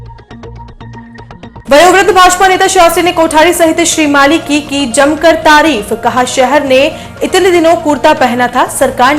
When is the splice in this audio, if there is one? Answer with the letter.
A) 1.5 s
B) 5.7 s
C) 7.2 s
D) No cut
A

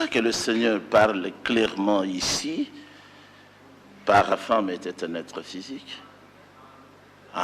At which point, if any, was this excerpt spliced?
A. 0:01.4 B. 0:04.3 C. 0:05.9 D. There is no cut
B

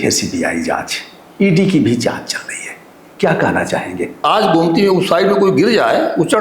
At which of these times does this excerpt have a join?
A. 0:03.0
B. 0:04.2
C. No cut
B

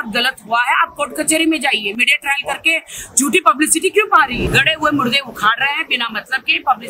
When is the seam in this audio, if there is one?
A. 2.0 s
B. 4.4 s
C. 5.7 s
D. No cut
B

